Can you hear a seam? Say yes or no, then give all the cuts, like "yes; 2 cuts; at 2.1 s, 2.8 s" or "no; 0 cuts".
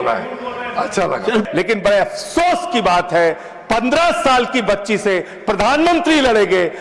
yes; 1 cut; at 1.5 s